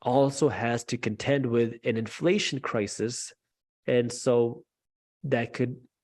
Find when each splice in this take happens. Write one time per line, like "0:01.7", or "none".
none